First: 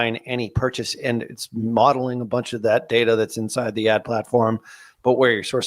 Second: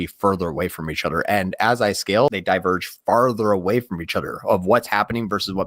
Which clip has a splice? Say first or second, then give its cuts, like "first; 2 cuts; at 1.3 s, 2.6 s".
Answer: second; 1 cut; at 2.3 s